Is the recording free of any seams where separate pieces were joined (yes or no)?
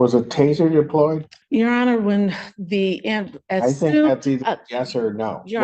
no